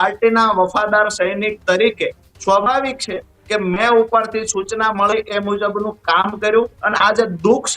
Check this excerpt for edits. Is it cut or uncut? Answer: uncut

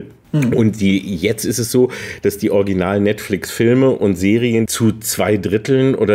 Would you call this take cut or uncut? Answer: cut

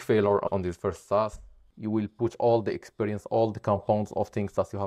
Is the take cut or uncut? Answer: cut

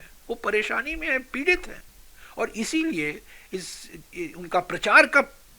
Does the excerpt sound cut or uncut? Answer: uncut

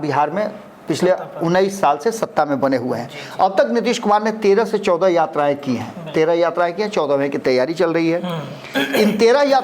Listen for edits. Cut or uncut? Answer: uncut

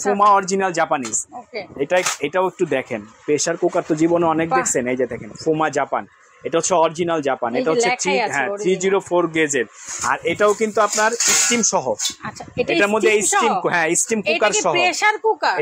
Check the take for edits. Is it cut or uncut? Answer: uncut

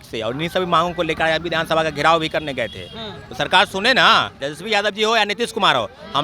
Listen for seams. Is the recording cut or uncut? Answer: cut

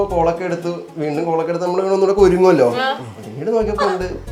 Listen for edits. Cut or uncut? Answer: uncut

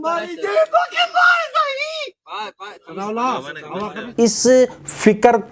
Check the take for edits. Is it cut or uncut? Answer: uncut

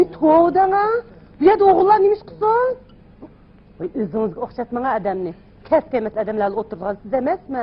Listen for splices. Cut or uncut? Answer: cut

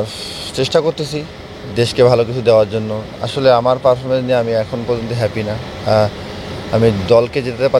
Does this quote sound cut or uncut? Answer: uncut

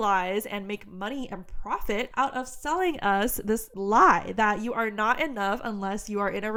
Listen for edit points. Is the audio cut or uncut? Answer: uncut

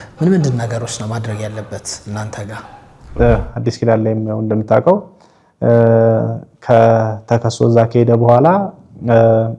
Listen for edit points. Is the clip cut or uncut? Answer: cut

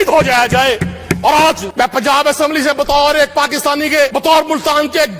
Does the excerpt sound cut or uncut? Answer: cut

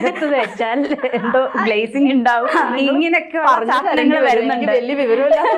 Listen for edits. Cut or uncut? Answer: uncut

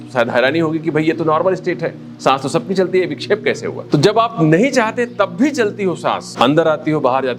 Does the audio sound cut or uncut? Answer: cut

